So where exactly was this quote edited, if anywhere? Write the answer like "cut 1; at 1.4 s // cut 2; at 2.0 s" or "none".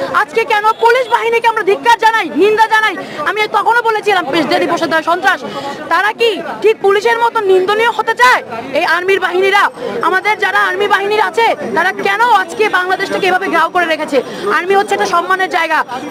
none